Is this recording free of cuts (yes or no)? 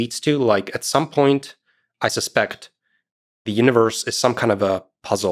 yes